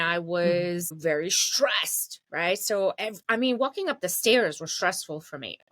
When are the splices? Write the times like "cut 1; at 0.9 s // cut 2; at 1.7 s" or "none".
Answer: cut 1; at 1.0 s

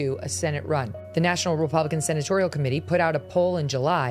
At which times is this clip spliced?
cut 1; at 1.0 s

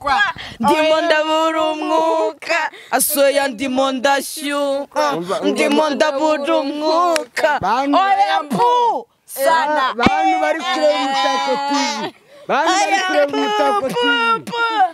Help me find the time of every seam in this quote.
none

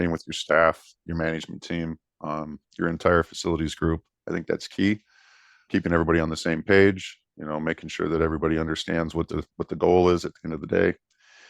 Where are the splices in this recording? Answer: cut 1; at 5.7 s

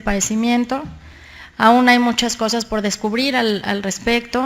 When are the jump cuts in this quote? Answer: cut 1; at 3.0 s

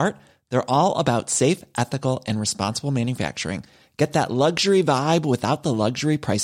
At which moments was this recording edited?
none

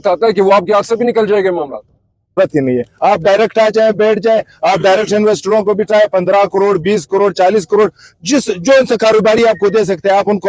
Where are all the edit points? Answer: cut 1; at 2.3 s

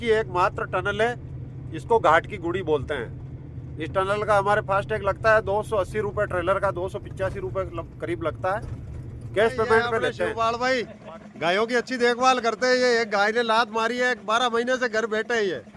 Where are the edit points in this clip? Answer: cut 1; at 10.3 s

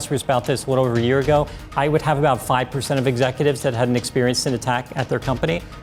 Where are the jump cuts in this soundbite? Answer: none

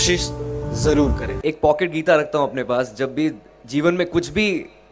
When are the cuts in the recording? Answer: cut 1; at 1.3 s

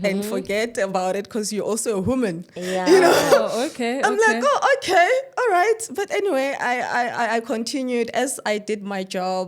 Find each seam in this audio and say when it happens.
none

